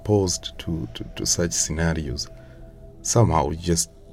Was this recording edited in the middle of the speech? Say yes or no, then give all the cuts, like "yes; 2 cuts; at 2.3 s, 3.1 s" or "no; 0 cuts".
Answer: no; 0 cuts